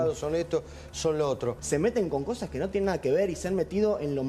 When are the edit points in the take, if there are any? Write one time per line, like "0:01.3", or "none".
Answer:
0:01.6